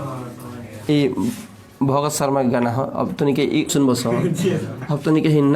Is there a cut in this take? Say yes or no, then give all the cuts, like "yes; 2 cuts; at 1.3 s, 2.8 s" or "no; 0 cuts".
yes; 1 cut; at 3.7 s